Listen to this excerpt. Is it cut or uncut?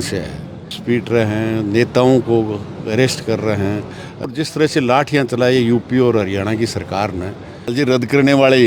cut